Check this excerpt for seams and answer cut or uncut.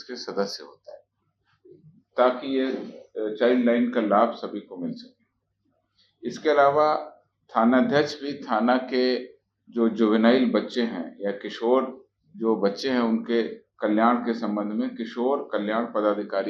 uncut